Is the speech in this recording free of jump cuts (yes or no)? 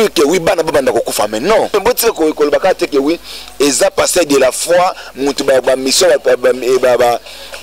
no